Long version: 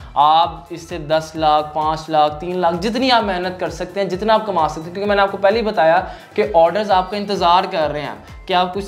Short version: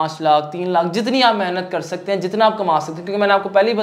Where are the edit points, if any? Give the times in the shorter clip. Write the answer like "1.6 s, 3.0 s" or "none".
none